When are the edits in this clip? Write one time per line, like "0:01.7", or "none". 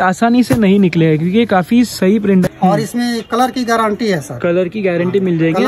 0:02.5